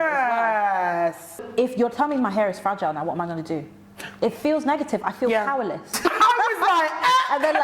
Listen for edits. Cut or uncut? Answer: cut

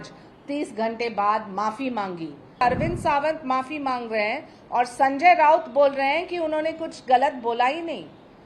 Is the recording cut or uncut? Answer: cut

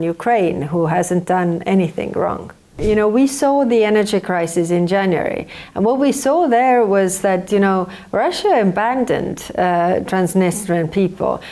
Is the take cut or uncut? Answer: cut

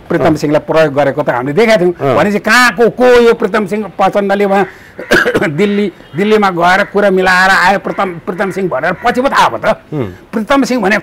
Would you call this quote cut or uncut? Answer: uncut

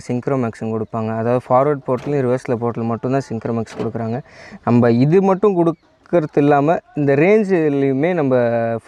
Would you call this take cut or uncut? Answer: uncut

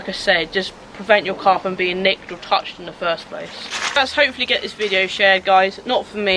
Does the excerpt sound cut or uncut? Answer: uncut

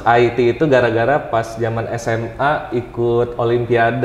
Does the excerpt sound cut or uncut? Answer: uncut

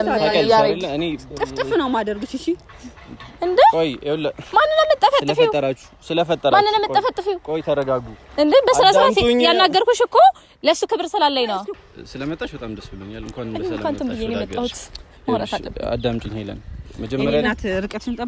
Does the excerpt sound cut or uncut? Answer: cut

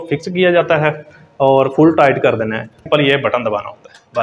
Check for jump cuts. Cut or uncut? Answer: cut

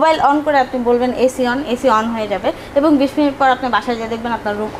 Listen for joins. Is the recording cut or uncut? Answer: uncut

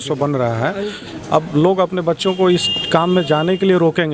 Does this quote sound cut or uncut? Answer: cut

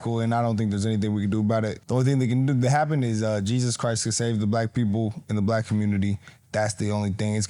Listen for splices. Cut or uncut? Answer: uncut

